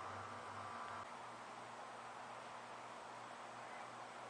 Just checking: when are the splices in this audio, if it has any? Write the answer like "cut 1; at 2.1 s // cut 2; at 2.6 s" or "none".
cut 1; at 1.0 s